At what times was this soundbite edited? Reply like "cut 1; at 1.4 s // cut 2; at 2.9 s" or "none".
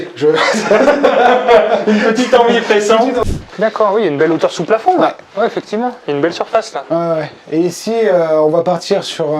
cut 1; at 3.1 s